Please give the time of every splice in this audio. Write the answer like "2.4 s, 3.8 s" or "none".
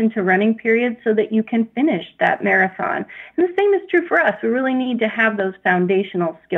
none